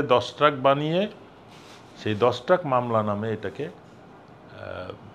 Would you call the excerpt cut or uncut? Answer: uncut